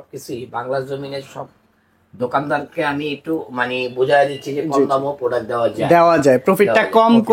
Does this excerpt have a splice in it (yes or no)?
no